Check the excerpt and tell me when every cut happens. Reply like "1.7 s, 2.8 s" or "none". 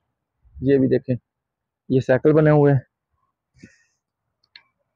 none